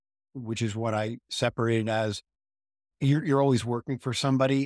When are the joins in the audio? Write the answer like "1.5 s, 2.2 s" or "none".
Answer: none